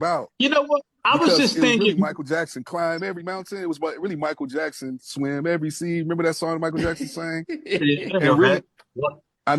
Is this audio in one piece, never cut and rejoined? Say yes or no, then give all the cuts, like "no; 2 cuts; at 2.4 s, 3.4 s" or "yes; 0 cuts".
yes; 0 cuts